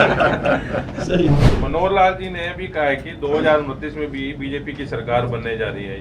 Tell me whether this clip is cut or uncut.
cut